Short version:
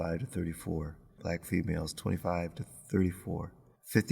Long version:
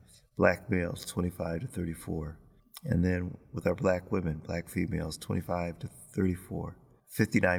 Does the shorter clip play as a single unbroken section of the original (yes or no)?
no